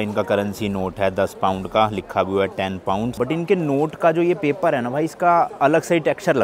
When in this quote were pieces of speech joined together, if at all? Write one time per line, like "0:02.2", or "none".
0:03.2